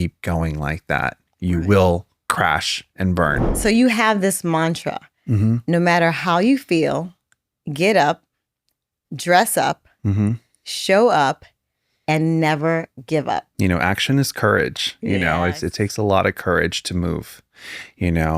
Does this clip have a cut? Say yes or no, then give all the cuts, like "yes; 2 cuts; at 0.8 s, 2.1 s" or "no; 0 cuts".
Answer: yes; 2 cuts; at 3.4 s, 13.5 s